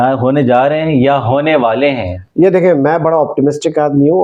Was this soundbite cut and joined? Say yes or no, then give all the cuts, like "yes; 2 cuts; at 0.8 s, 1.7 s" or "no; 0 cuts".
no; 0 cuts